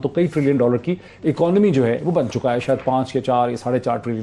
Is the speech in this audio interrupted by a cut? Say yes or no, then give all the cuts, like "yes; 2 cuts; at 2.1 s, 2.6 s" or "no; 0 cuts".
no; 0 cuts